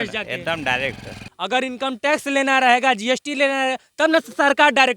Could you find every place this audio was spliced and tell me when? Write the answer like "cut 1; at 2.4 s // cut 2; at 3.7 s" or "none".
cut 1; at 1.2 s